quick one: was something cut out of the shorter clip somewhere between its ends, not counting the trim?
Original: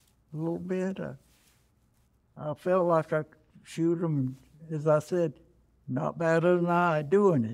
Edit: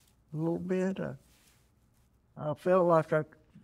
no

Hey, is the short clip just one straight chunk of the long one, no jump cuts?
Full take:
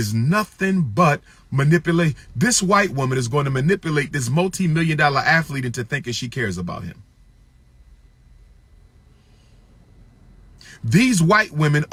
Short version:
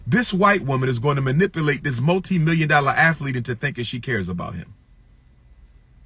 yes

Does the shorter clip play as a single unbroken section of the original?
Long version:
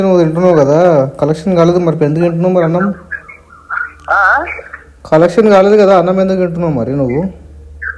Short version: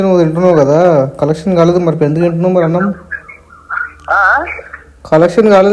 yes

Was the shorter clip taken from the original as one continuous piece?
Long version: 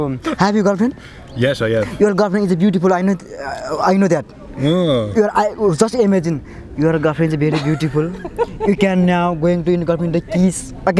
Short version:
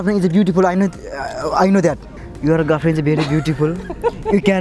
no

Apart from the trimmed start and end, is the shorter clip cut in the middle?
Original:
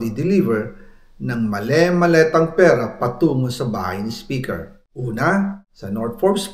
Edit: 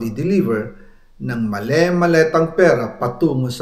no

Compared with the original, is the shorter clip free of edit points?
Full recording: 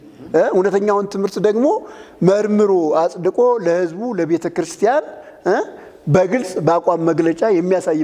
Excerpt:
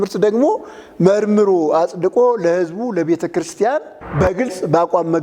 no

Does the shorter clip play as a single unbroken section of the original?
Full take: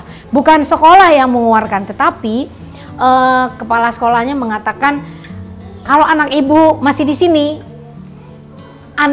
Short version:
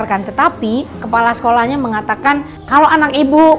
no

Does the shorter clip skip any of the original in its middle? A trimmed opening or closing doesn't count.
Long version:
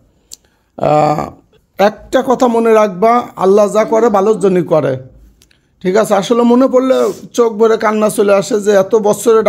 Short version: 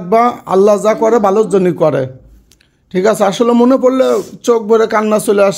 no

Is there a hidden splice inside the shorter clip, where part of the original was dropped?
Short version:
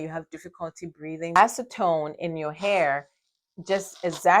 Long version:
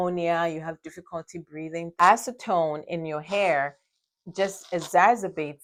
yes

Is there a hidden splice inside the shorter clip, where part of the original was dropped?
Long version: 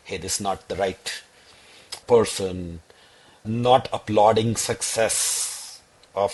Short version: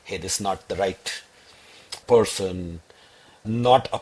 no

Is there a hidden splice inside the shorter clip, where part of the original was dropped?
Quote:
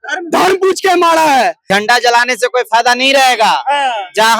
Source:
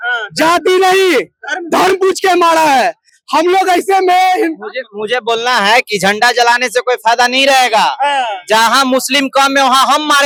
yes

